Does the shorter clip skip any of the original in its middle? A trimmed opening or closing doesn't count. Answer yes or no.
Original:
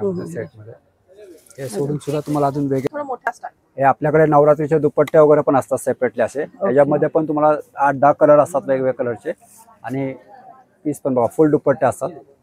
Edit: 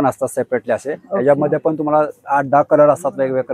no